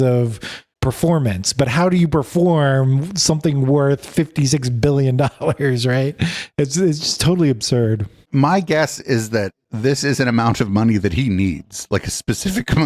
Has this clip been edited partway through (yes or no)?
no